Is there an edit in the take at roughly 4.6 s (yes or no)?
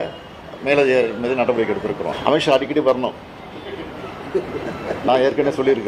no